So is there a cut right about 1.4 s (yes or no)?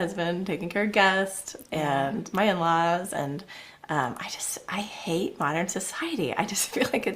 yes